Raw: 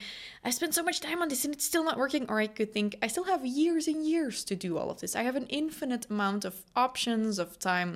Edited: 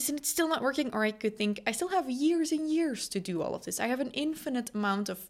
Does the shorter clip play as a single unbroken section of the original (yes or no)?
yes